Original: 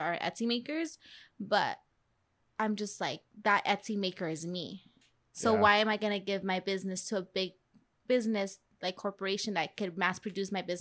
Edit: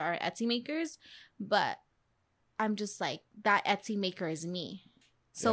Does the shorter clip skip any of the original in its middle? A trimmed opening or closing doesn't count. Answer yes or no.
no